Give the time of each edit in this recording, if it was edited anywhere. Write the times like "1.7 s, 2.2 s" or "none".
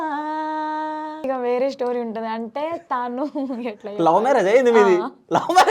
1.3 s

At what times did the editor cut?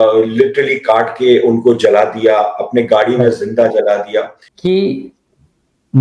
4.4 s

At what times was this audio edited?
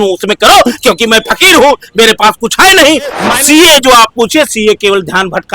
3.3 s

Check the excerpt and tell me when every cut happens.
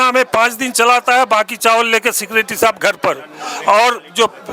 none

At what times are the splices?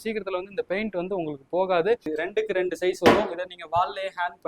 2.0 s

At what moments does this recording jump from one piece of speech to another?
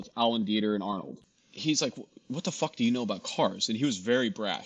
1.1 s

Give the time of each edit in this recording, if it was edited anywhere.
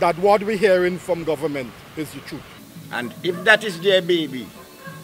2.5 s

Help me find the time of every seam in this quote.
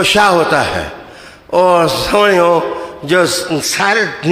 1.3 s

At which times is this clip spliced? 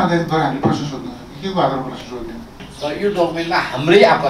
2.6 s

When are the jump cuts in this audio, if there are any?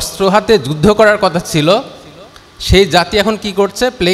none

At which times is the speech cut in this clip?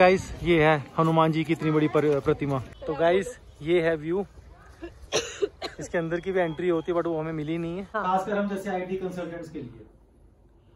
2.7 s, 7.9 s

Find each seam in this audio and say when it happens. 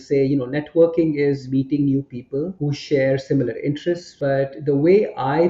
1.4 s, 2.6 s, 4.1 s

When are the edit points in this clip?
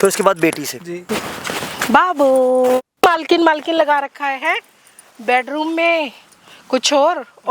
1.0 s, 2.9 s

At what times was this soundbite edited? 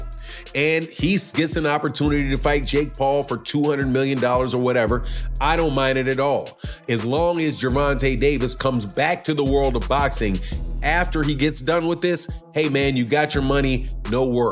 none

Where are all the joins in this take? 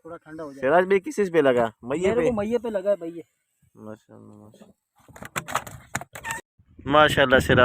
6.4 s

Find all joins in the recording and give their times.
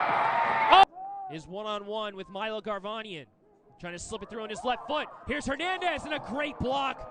1.0 s

